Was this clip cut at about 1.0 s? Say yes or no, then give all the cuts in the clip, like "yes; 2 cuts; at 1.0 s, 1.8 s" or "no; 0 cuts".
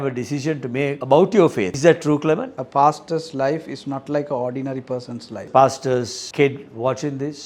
yes; 5 cuts; at 1.0 s, 1.7 s, 2.6 s, 5.5 s, 6.2 s